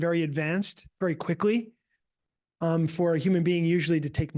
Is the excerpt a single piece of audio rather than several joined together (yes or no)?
yes